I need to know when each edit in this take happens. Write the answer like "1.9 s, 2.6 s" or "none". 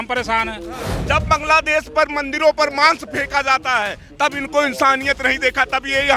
0.9 s